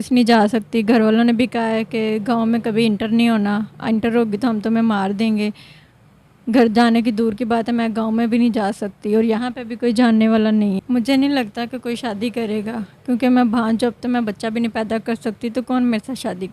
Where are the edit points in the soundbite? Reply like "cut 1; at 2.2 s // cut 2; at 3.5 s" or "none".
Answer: cut 1; at 10.8 s